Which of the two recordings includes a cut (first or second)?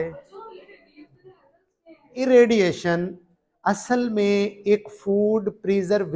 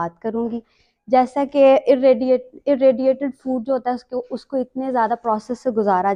first